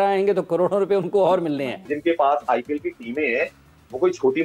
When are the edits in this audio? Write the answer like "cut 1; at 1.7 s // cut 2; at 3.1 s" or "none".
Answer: cut 1; at 1.9 s